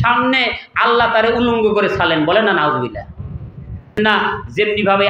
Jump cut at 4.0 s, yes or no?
yes